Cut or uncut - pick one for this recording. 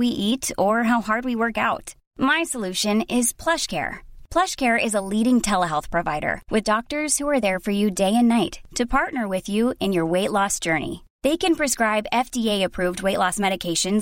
uncut